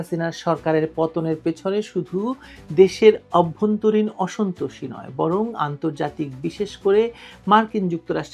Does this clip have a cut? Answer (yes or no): no